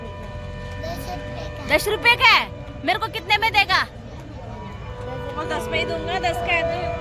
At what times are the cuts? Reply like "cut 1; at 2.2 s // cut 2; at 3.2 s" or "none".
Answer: none